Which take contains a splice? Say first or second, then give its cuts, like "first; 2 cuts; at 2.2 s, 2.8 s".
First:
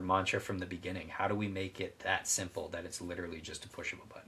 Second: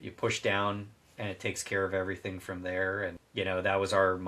second; 1 cut; at 3.2 s